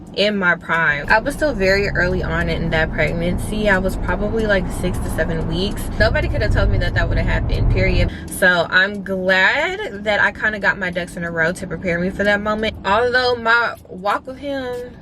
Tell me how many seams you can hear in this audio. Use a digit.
4